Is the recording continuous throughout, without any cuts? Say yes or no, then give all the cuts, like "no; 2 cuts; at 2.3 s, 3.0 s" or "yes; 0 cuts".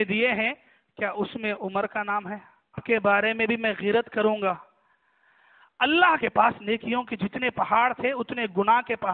no; 2 cuts; at 2.8 s, 6.2 s